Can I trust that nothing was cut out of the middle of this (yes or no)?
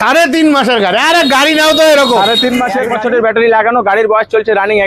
no